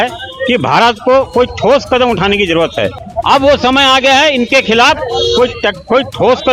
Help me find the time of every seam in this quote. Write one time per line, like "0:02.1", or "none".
0:03.0